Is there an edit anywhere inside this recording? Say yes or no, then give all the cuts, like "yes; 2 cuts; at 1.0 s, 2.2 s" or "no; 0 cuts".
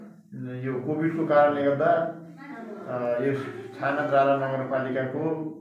no; 0 cuts